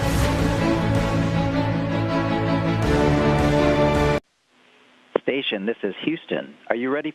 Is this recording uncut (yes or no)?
yes